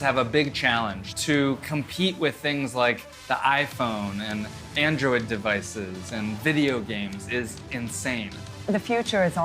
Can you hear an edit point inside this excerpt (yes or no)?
yes